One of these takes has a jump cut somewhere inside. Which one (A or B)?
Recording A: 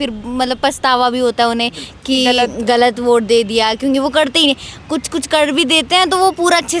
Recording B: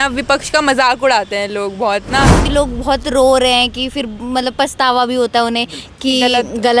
B